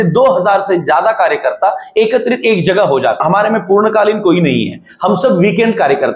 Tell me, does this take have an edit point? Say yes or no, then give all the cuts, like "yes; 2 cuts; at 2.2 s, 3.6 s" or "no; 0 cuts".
yes; 1 cut; at 3.2 s